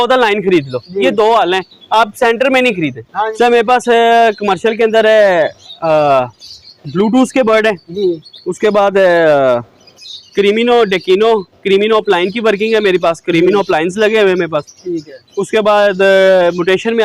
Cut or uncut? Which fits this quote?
cut